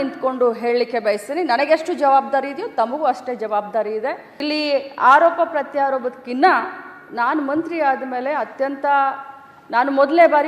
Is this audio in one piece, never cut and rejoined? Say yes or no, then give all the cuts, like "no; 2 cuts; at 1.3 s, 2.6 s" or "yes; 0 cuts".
no; 1 cut; at 4.3 s